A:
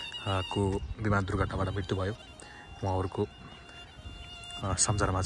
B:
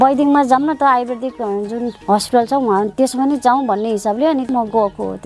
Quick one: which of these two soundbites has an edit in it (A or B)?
B